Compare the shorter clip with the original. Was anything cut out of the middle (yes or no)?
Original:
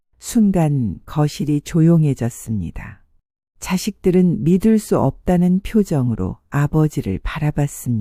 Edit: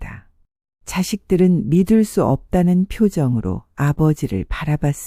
no